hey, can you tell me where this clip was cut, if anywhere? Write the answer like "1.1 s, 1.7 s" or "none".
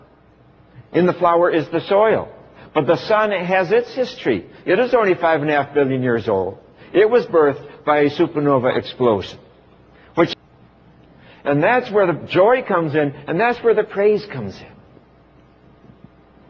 none